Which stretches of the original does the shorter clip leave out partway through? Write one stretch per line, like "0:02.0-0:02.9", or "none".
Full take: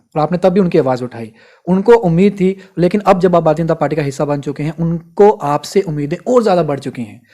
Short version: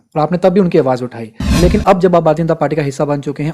0:01.5-0:02.7

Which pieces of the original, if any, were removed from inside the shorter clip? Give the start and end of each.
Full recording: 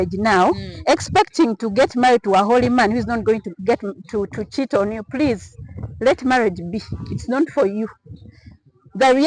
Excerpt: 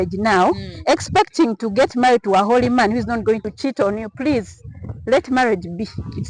0:03.5-0:04.4

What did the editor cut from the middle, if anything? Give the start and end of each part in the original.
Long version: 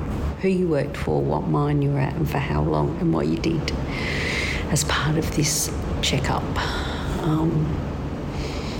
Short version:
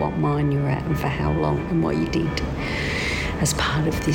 none

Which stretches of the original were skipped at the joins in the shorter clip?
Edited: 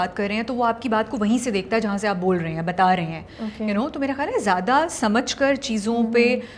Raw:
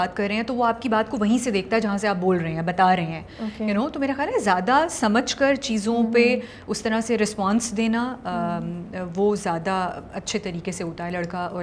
none

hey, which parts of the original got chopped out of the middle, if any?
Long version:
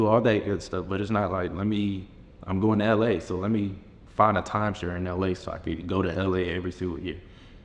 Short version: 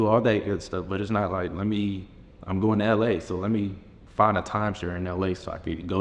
none

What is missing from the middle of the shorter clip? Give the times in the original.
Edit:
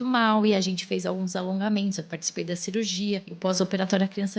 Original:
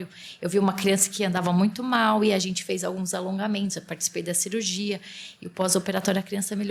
0:05.1-0:05.4

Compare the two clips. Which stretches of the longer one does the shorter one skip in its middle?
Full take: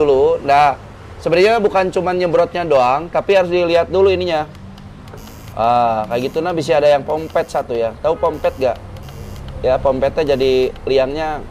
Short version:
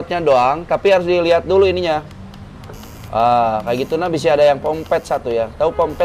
none

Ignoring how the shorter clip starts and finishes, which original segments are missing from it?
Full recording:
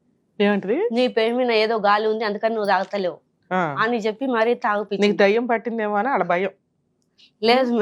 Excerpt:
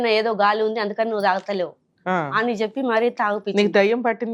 none

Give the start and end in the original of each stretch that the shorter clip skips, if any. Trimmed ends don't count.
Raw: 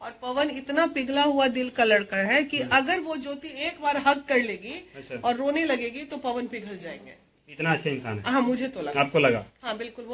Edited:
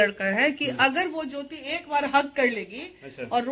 none

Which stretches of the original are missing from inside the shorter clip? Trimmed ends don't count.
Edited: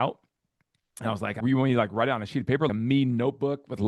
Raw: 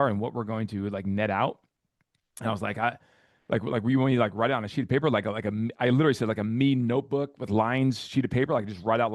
0:02.8-0:03.8
0:05.1-0:06.4

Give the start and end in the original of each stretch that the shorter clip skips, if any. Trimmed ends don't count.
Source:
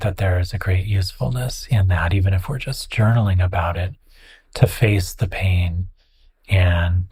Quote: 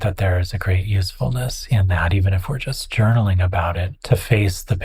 0:03.9-0:04.4

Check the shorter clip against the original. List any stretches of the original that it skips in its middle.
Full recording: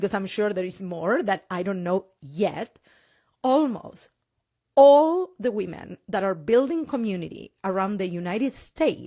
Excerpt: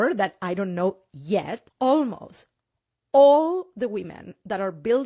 0:02.7-0:03.2

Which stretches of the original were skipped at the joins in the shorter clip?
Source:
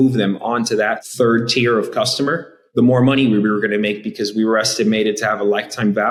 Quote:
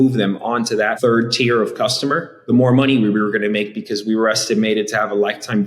0:00.9-0:01.1
0:02.5-0:02.6

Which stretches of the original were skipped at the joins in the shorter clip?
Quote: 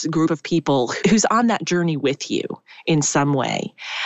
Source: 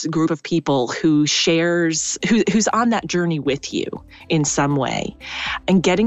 0:01.0-0:02.4

